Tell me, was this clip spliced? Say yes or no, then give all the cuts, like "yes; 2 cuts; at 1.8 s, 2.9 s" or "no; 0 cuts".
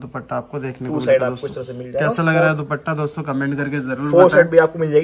no; 0 cuts